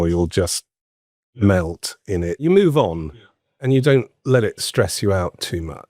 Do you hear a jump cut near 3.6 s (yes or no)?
yes